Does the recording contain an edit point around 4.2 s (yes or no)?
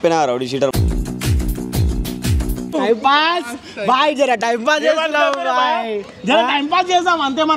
no